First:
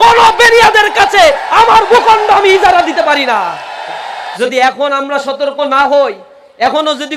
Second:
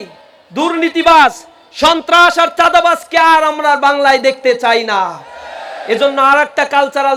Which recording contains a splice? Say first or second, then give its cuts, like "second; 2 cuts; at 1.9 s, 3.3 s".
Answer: first; 1 cut; at 4.3 s